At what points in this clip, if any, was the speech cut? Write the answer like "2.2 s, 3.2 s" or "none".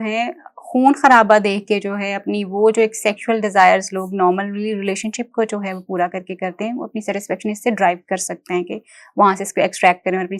none